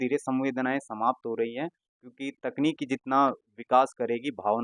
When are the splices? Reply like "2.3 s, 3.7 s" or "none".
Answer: none